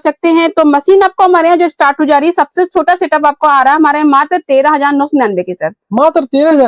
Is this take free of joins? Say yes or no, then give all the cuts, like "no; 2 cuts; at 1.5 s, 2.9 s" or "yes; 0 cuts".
yes; 0 cuts